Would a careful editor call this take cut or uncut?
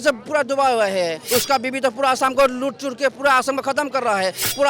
cut